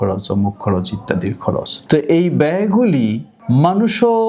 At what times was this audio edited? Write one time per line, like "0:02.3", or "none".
0:01.8
0:03.3